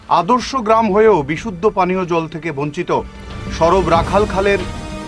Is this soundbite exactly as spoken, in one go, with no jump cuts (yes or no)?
yes